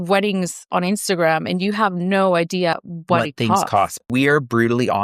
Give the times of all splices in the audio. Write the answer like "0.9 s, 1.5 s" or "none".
2.8 s, 4.0 s